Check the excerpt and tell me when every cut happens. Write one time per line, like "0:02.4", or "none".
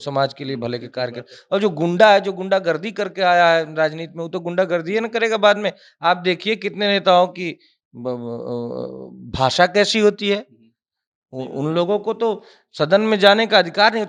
none